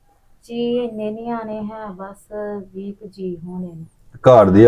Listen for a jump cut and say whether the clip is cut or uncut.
uncut